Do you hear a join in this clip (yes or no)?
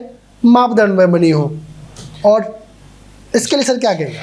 no